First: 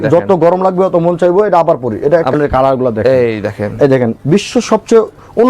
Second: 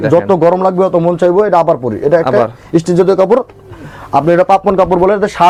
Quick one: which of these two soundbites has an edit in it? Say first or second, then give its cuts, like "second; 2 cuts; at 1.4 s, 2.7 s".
first; 1 cut; at 2.3 s